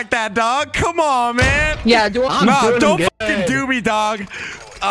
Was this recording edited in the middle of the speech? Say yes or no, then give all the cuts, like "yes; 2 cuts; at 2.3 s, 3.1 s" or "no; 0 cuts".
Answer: yes; 1 cut; at 2.3 s